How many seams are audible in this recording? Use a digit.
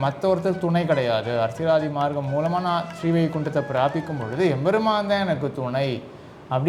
0